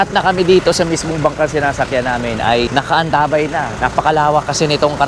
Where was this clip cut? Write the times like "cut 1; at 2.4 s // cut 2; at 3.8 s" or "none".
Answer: cut 1; at 3.7 s